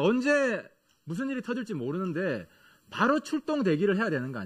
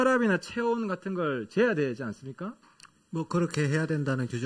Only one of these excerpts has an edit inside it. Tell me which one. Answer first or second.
first